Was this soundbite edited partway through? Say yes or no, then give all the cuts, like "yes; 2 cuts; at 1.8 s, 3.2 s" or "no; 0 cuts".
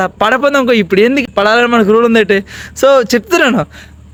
no; 0 cuts